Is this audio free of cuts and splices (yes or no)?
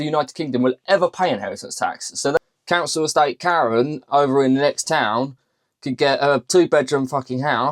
no